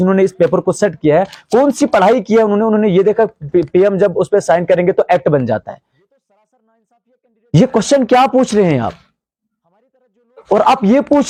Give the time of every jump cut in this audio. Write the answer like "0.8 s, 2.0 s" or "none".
none